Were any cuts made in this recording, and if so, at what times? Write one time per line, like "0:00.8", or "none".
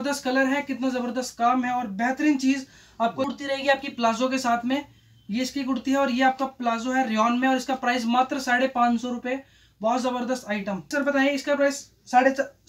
0:03.3
0:10.9